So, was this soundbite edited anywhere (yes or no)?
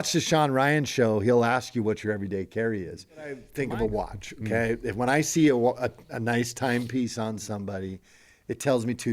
yes